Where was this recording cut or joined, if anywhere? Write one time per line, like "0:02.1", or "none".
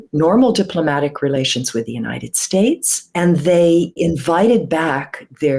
0:03.0
0:04.0